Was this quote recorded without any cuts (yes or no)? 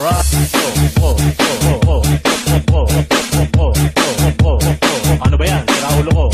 yes